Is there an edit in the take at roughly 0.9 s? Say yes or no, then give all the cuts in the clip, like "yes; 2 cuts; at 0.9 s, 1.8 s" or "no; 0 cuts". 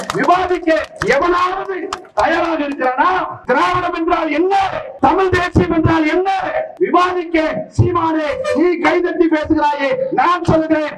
no; 3 cuts; at 3.3 s, 4.8 s, 6.7 s